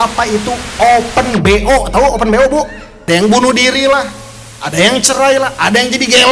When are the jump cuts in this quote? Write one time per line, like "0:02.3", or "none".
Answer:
0:03.0